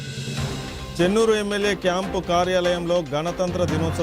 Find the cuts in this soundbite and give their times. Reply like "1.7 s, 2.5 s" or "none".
0.9 s